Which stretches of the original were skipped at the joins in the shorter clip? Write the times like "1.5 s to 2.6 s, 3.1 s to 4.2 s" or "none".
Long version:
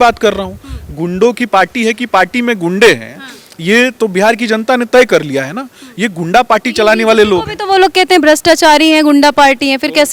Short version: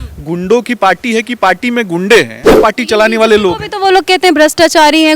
3.3 s to 6.4 s

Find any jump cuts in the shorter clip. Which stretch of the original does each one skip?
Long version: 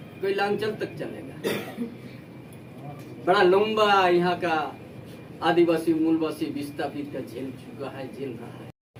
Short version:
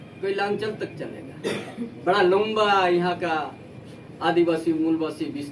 1.9 s to 3.2 s

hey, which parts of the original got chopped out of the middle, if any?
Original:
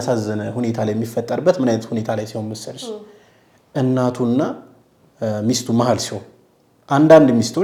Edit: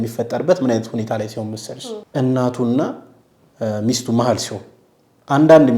2.9 s to 3.6 s

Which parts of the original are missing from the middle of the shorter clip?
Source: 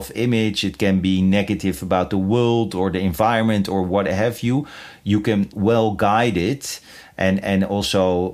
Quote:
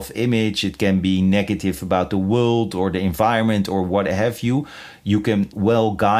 none

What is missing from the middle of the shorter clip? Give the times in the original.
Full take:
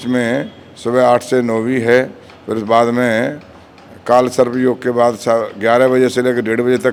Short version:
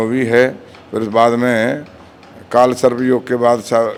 none

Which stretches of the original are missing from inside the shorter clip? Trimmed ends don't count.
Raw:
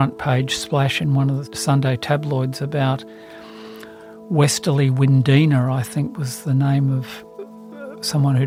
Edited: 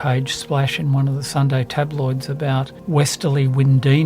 1.4 s to 1.6 s, 3.1 s to 4.2 s

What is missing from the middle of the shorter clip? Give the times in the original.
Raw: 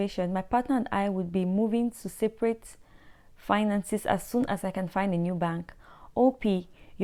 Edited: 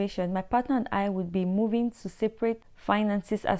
2.7 s to 3.3 s

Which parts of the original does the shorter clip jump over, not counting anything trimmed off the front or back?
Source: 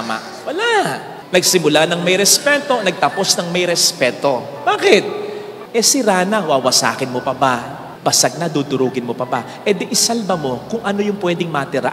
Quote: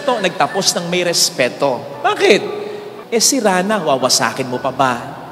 none

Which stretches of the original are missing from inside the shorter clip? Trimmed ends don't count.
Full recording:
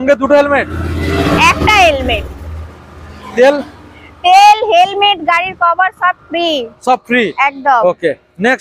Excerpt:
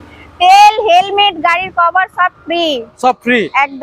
none

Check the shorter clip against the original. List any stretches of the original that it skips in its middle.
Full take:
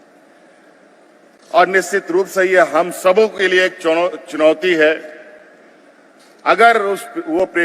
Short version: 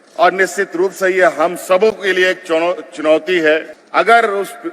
5.1 s to 6.3 s

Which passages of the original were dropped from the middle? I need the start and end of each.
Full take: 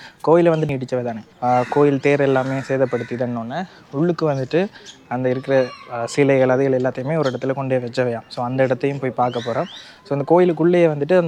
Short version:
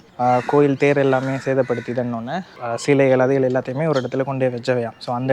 3.8 s to 5.8 s

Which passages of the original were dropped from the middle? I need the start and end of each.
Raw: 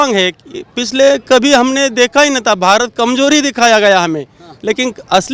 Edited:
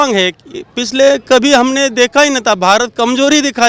none

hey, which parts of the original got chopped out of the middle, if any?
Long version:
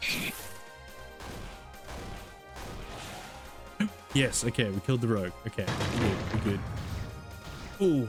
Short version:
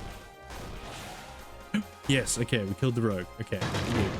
none

